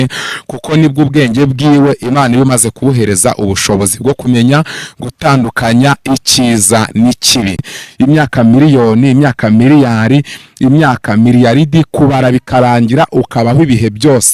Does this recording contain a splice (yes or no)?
yes